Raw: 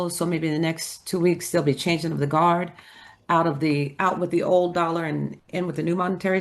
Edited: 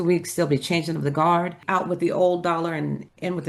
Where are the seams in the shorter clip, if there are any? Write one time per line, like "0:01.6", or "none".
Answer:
0:01.6